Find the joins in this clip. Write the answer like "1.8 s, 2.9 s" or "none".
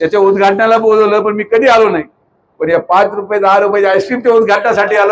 none